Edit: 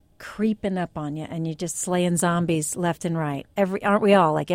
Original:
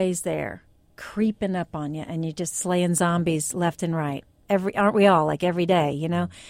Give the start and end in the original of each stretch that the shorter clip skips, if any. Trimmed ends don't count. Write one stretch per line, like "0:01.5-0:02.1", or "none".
0:04.2-0:04.3